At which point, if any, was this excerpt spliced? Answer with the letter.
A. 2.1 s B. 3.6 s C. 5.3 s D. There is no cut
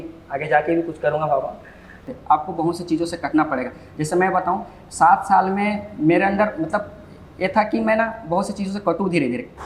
A